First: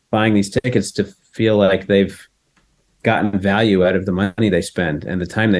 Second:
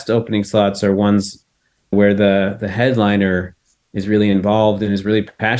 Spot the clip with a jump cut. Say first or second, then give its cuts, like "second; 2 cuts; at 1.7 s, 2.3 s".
second; 1 cut; at 1.9 s